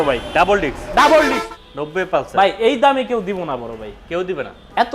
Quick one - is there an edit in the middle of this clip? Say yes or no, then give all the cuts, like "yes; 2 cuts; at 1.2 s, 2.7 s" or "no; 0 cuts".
yes; 1 cut; at 1.4 s